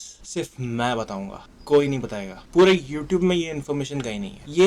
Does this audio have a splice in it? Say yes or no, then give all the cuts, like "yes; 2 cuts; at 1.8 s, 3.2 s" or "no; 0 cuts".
no; 0 cuts